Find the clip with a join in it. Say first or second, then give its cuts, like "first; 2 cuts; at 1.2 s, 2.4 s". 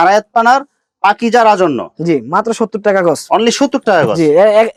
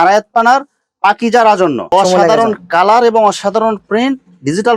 second; 1 cut; at 1.9 s